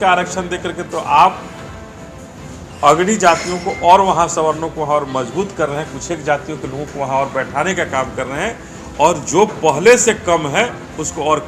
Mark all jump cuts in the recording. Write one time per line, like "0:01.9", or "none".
none